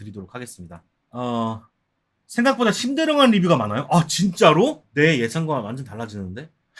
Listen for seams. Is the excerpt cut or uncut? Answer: cut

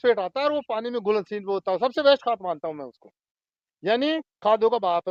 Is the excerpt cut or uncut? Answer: uncut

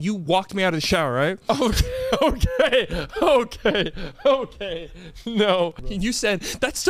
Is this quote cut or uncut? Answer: cut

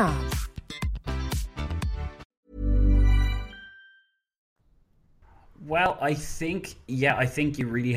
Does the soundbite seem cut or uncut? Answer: uncut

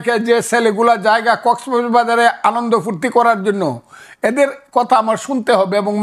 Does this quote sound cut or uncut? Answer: uncut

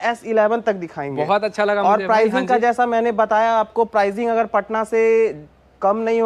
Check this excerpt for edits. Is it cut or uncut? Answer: uncut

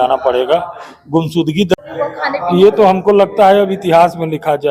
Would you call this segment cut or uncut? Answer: cut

